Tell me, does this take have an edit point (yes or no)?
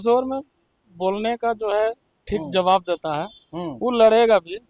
no